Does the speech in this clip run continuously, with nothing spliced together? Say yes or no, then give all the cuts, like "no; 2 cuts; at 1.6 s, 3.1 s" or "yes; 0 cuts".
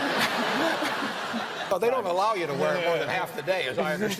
no; 1 cut; at 1.7 s